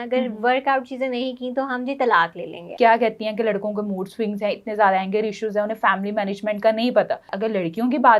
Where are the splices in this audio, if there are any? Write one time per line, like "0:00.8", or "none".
0:02.6
0:07.3